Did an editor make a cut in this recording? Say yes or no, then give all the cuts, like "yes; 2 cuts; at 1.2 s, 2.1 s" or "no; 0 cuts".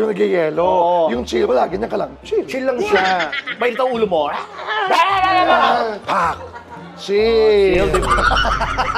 no; 0 cuts